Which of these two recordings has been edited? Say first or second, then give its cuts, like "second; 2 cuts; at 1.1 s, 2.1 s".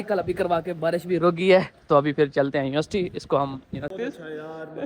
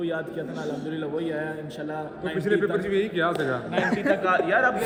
first; 1 cut; at 3.9 s